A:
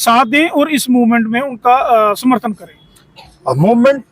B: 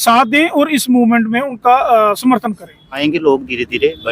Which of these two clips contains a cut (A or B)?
B